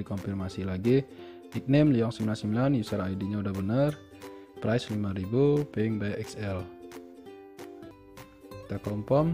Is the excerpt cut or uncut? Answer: cut